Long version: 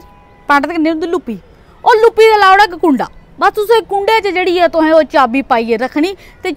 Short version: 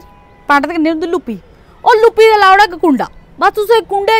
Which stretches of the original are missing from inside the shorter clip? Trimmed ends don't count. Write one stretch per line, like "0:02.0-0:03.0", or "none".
none